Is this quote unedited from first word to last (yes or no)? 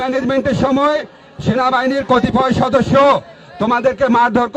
yes